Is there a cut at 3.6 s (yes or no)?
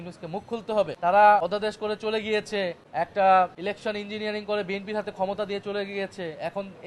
yes